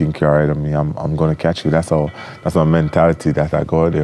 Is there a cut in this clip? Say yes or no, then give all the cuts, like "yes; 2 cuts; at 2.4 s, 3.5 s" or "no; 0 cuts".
no; 0 cuts